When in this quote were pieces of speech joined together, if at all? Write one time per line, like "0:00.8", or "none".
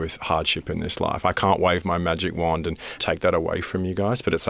0:02.9